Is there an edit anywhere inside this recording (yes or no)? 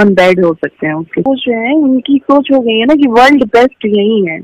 yes